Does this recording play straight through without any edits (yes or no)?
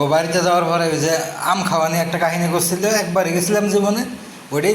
yes